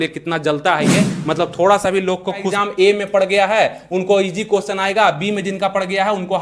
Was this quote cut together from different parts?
yes; 1 cut; at 2.5 s

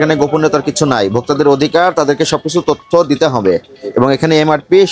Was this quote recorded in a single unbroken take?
yes; 0 cuts

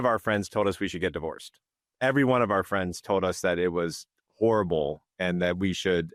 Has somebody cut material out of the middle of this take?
no; 0 cuts

